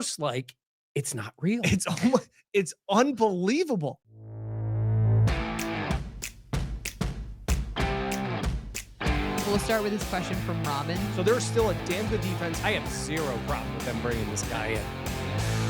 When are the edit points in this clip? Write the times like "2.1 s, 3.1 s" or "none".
4.1 s